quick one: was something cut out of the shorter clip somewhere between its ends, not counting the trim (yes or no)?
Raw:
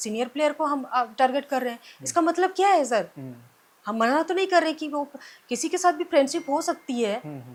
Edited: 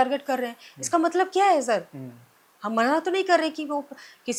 no